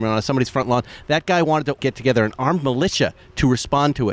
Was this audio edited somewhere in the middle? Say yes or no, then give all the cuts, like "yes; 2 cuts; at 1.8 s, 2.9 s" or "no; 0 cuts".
no; 0 cuts